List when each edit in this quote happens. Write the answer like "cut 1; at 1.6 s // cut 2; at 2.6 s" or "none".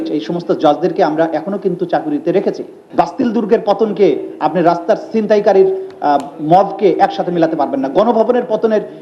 cut 1; at 2.7 s